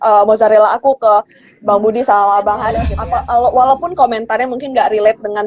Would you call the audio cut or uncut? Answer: cut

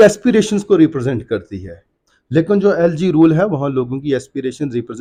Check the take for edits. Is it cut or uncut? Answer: uncut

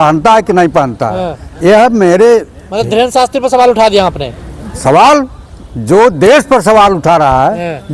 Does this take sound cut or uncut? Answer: uncut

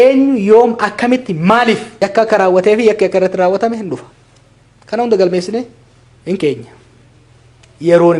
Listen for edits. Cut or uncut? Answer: cut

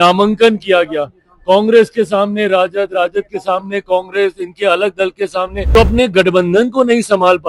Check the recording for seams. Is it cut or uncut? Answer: cut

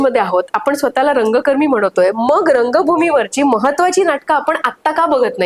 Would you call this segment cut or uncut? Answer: uncut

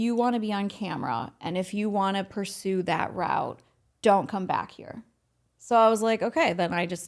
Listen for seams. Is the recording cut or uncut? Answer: uncut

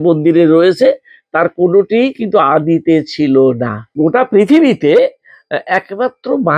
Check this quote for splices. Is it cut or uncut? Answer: cut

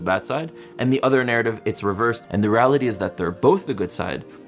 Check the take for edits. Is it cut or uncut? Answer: cut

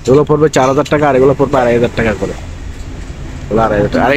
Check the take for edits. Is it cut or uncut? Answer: uncut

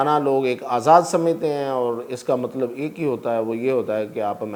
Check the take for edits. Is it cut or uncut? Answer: uncut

